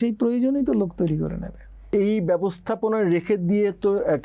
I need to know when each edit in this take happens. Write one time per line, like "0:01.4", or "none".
0:01.9